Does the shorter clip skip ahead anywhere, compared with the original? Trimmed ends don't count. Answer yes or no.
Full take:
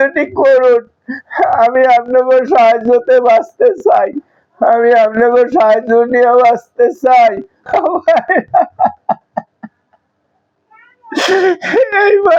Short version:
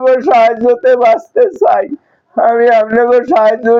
no